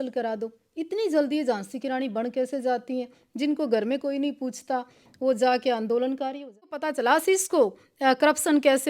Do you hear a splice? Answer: yes; 1 cut; at 6.9 s

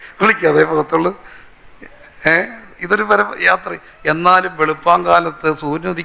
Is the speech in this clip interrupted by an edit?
no; 0 cuts

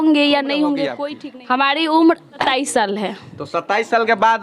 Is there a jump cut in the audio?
yes; 2 cuts; at 0.9 s, 2.4 s

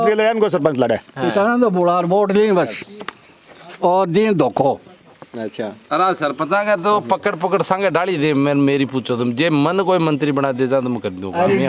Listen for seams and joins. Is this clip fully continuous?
yes; 0 cuts

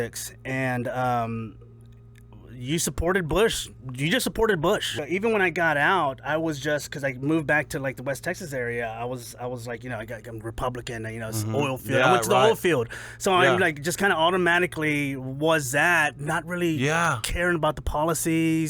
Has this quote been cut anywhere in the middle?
yes; 1 cut; at 4.9 s

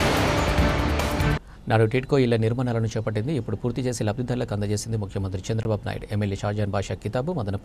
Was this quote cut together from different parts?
yes; 1 cut; at 1.3 s

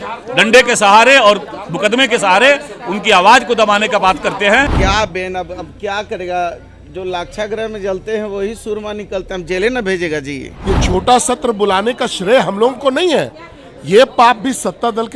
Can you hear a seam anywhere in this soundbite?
yes; 2 cuts; at 4.7 s, 10.5 s

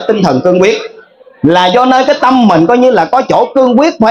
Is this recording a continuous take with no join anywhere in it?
yes; 0 cuts

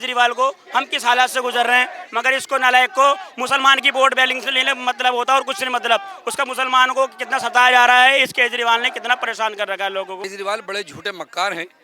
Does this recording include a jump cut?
yes; 1 cut; at 10.2 s

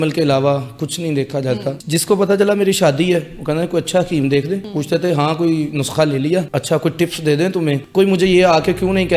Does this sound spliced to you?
yes; 4 cuts; at 1.8 s, 4.7 s, 6.5 s, 7.8 s

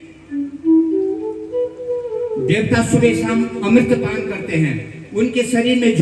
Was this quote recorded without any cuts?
yes; 0 cuts

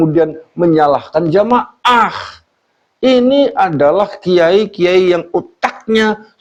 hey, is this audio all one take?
yes; 0 cuts

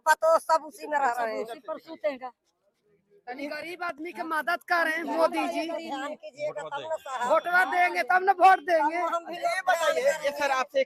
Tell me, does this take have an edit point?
no; 0 cuts

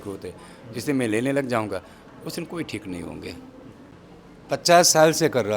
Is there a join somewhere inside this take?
yes; 1 cut; at 3.9 s

